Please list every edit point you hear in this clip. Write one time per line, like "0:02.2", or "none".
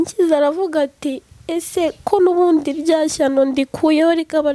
none